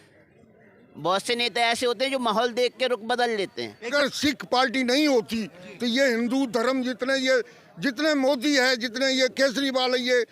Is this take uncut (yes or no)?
no